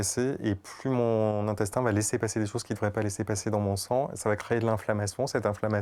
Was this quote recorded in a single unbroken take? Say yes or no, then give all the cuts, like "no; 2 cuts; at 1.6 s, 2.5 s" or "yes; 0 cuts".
yes; 0 cuts